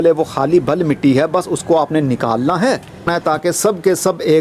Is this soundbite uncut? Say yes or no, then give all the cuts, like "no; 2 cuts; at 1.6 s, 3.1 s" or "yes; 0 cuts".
no; 1 cut; at 3.1 s